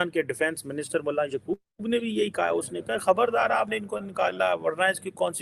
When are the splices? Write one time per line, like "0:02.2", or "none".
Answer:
none